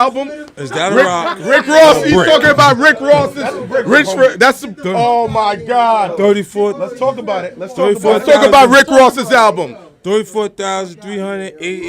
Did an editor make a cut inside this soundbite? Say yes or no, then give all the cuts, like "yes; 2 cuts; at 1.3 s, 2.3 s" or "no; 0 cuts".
no; 0 cuts